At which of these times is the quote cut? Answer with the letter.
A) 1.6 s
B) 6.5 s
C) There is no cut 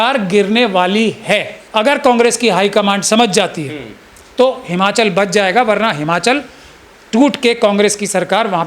A